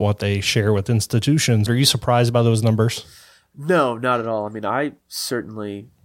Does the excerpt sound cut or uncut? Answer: cut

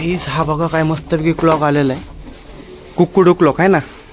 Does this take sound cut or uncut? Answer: uncut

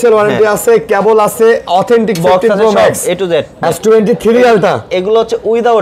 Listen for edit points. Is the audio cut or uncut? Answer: cut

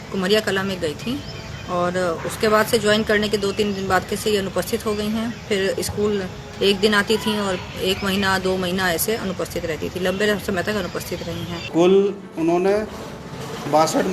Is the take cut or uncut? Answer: cut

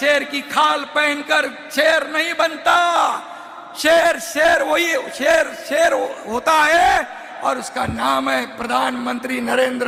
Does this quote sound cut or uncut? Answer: uncut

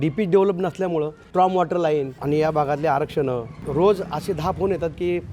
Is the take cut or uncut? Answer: cut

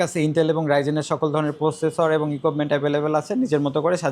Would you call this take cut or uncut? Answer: uncut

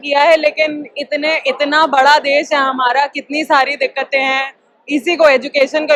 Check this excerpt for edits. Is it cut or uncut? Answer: uncut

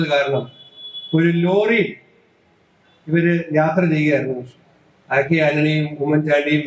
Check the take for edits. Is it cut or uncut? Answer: uncut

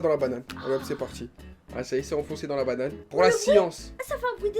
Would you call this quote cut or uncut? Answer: cut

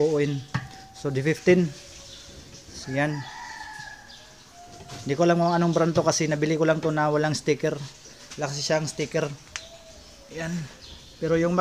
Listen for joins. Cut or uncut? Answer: uncut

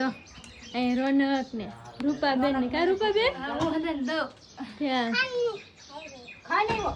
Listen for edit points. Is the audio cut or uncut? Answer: uncut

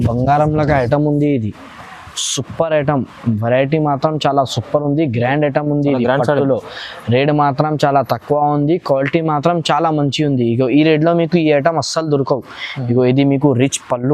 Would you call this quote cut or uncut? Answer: uncut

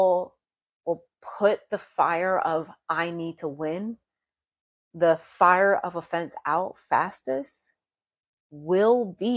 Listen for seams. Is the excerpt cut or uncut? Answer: uncut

